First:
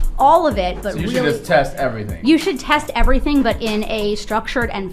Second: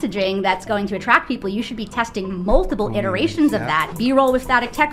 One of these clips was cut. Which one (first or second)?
second